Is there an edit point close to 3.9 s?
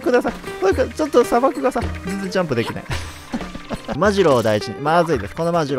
yes; 1 cut; at 3.9 s

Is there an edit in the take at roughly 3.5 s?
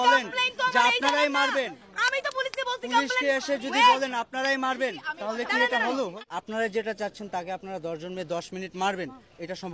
no; 1 cut; at 6.2 s

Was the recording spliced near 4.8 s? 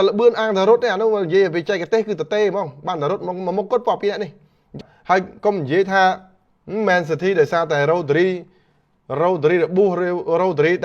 yes; 1 cut; at 4.8 s

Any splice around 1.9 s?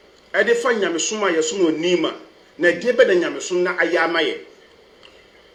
no; 0 cuts

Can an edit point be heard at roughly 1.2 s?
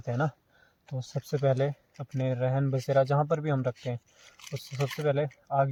no; 0 cuts

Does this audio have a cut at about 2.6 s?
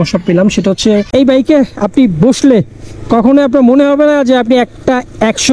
no; 1 cut; at 1.1 s

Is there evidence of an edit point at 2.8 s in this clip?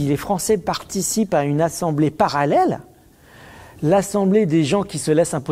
no; 0 cuts

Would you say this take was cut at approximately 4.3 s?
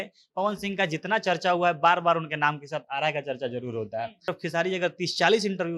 yes; 1 cut; at 4.3 s

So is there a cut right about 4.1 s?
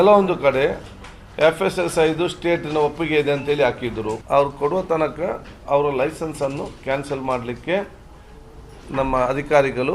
yes; 1 cut; at 4.1 s

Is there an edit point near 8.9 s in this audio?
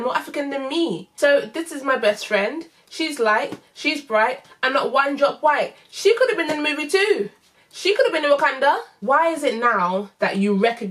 yes; 2 cuts; at 1.1 s, 8.9 s

